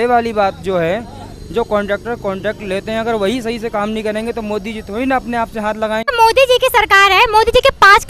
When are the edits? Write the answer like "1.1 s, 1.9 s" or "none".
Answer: 6.1 s